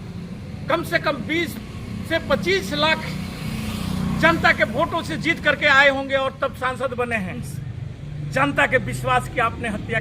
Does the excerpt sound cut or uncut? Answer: cut